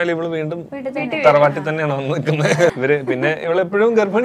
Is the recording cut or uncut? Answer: cut